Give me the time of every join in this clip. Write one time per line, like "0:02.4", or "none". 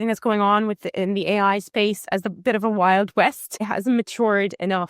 0:03.6